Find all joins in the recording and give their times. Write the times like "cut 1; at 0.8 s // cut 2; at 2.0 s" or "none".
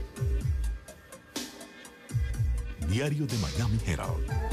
none